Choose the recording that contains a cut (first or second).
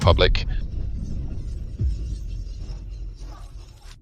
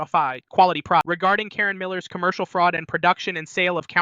second